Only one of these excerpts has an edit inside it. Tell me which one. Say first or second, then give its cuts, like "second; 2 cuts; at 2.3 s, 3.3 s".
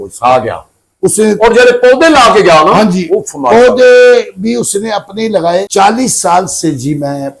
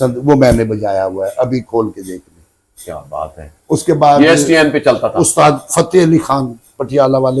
first; 1 cut; at 5.7 s